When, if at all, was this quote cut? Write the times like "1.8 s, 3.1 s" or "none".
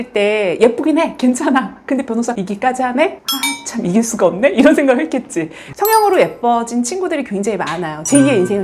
5.7 s